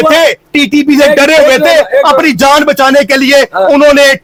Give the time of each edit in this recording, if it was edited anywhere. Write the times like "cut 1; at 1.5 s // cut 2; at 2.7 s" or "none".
none